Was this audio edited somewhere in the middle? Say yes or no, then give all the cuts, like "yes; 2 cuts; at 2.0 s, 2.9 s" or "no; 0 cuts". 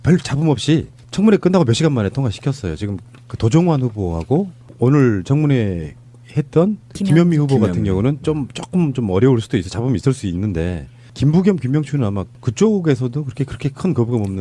no; 0 cuts